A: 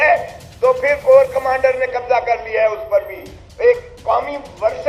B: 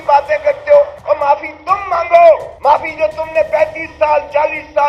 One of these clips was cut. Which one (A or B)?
B